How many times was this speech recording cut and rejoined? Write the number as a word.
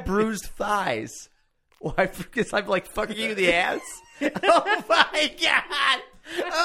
zero